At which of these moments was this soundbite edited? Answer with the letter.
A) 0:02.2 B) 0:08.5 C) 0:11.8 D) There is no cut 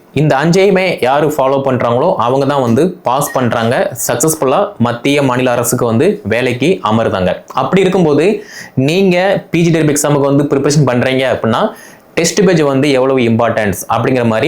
D